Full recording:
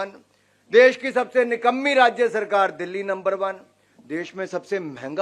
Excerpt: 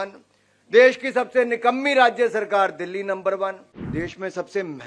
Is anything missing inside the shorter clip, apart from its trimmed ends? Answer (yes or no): yes